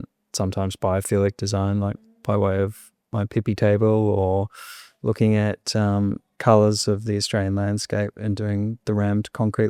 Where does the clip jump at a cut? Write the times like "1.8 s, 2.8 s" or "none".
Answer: none